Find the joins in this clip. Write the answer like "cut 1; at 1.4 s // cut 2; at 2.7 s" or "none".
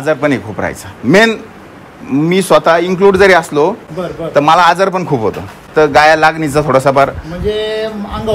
cut 1; at 3.9 s // cut 2; at 5.6 s